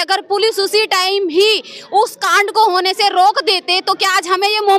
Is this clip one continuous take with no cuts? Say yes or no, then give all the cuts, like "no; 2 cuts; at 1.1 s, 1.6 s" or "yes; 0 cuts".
yes; 0 cuts